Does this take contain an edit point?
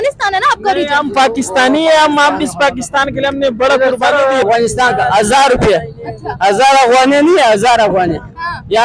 yes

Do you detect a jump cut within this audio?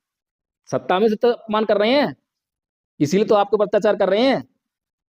yes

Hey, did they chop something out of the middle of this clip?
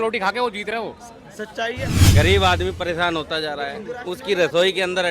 yes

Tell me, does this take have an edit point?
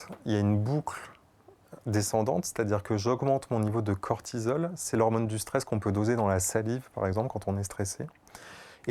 no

